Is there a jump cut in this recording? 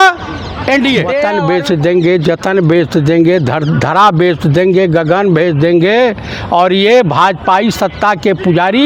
yes; 1 cut; at 1.3 s

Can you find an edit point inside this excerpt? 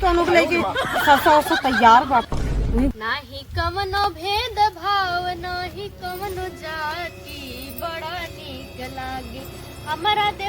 yes; 1 cut; at 3.0 s

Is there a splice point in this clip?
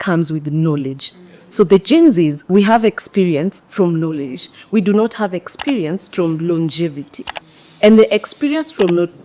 no; 0 cuts

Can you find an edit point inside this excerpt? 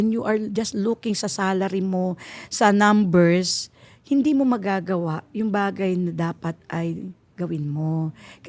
no; 0 cuts

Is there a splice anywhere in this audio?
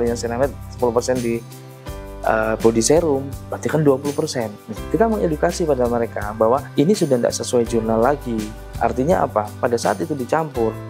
no; 0 cuts

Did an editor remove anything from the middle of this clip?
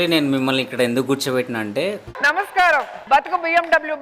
no; 0 cuts

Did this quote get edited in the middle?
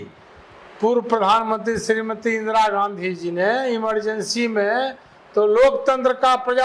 no; 0 cuts

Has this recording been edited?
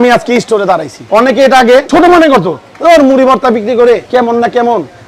yes; 3 cuts; at 0.9 s, 1.9 s, 4.0 s

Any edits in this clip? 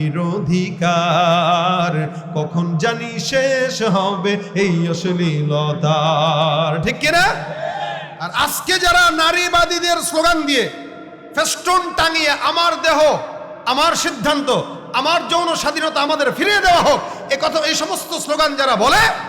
yes; 1 cut; at 8.1 s

